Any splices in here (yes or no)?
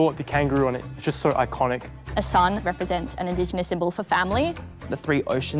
no